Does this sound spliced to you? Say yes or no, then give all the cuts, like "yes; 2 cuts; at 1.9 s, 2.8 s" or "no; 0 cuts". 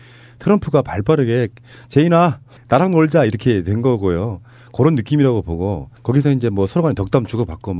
no; 0 cuts